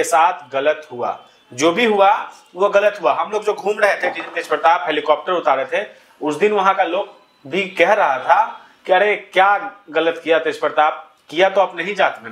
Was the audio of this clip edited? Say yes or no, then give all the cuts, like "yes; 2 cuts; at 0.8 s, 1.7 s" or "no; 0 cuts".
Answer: no; 0 cuts